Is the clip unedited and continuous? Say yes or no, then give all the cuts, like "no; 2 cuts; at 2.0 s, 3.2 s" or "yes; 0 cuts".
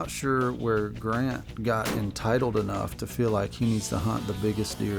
no; 1 cut; at 1.5 s